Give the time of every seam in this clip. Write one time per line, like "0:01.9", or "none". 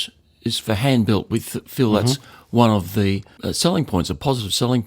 0:03.4